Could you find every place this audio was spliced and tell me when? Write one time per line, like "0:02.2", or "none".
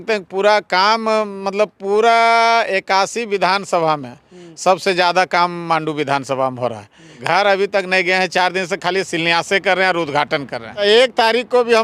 0:07.2
0:10.8